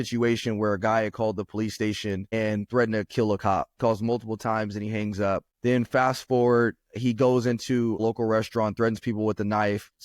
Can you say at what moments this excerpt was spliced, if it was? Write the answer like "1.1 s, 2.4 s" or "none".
3.7 s